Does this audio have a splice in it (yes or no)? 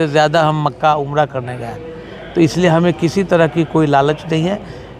no